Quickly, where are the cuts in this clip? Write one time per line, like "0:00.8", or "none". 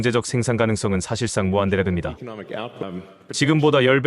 0:02.8